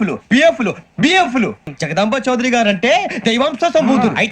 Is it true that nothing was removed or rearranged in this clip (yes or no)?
no